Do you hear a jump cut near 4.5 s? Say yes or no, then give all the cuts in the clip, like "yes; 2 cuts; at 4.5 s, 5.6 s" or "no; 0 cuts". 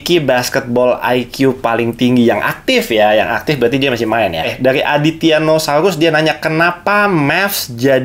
yes; 1 cut; at 4.5 s